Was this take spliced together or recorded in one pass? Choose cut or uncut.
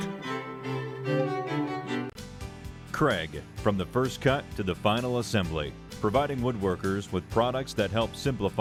uncut